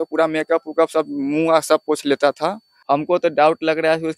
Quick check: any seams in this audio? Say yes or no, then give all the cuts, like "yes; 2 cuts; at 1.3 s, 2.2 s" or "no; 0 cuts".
yes; 1 cut; at 2.7 s